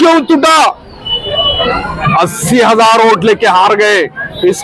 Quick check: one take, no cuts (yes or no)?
no